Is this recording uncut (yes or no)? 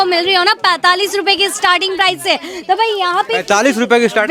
yes